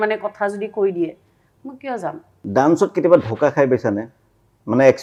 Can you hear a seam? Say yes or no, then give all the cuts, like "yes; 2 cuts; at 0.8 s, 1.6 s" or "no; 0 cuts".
no; 0 cuts